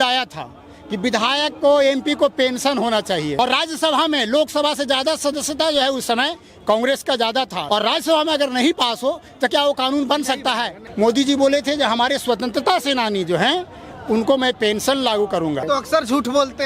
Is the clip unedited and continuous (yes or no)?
no